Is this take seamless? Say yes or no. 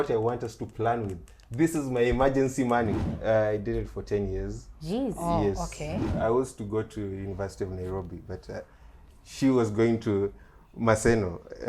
no